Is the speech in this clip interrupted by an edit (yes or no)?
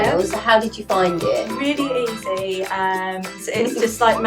yes